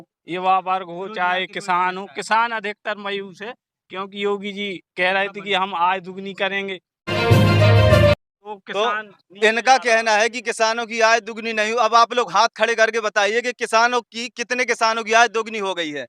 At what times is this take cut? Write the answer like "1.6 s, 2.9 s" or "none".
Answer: 6.9 s, 8.6 s